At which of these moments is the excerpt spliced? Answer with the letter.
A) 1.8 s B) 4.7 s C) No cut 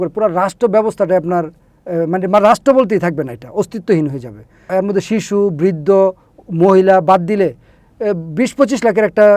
B